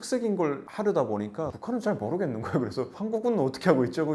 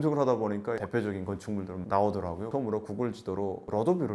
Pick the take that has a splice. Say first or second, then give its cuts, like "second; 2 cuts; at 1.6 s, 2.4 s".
second; 1 cut; at 2.5 s